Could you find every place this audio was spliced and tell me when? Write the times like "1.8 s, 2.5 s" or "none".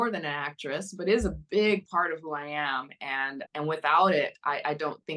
3.4 s